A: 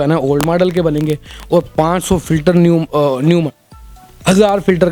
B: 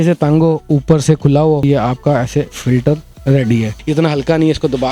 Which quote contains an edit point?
B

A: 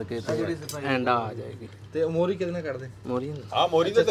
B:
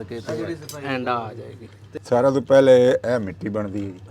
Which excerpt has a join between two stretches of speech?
B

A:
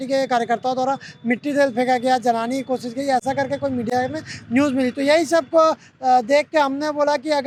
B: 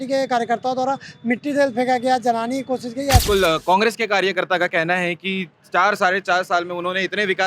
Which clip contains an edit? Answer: B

